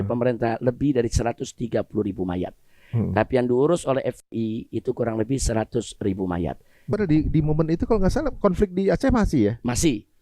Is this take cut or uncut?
cut